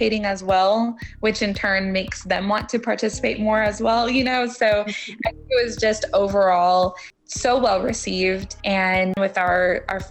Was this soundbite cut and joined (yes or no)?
yes